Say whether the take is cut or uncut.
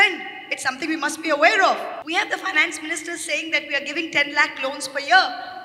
cut